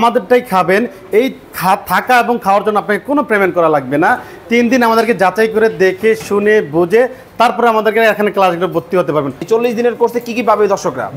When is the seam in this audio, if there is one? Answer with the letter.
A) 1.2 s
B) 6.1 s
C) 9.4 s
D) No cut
C